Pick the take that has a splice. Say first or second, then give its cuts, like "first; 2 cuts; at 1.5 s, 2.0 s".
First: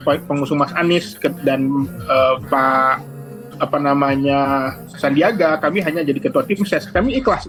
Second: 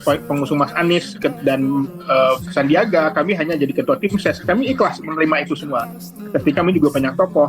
second; 2 cuts; at 2.4 s, 6.6 s